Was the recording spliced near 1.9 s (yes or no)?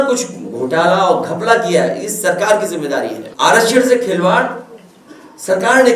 no